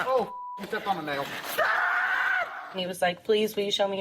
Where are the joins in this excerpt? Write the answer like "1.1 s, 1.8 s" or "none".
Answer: 2.7 s